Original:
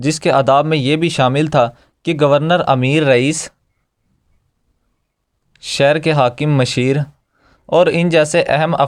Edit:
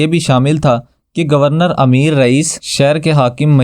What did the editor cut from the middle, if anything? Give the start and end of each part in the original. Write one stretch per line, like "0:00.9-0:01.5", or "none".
0:03.5-0:05.6